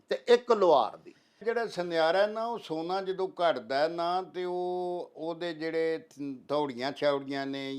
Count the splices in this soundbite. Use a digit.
1